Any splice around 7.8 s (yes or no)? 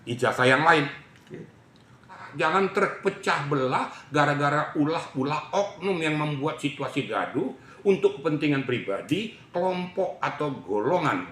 no